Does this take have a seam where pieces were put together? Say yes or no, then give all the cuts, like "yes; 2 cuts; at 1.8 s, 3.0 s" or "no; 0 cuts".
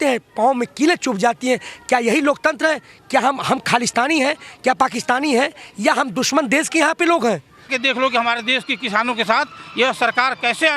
yes; 1 cut; at 7.7 s